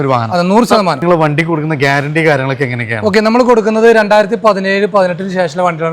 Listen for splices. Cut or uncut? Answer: cut